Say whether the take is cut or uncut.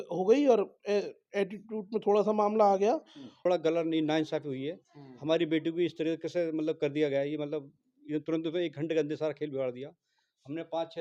cut